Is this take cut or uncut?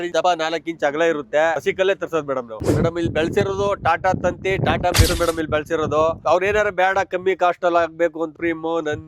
cut